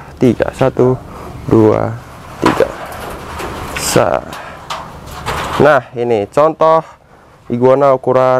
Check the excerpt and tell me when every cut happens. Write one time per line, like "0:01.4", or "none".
none